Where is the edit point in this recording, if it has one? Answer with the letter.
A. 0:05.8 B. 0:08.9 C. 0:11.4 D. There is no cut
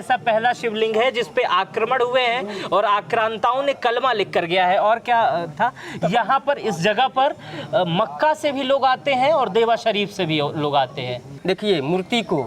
C